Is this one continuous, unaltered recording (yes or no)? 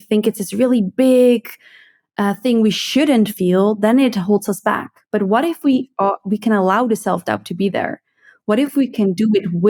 yes